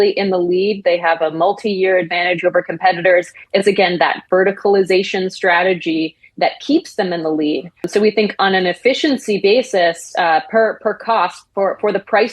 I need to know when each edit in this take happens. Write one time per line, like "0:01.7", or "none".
0:07.8